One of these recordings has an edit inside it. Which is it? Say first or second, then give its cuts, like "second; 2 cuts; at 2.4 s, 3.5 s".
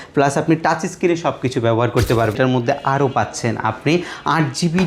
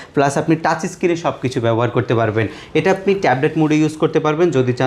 first; 1 cut; at 2.4 s